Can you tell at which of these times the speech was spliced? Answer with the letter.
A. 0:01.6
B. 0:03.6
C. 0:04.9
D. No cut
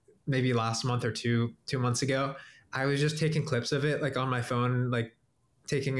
D